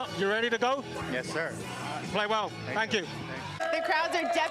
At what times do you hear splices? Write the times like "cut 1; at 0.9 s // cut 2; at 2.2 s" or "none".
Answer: cut 1; at 3.6 s